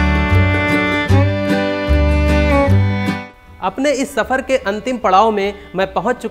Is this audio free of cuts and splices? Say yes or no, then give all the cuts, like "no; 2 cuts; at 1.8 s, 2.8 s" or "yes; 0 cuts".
no; 1 cut; at 3.3 s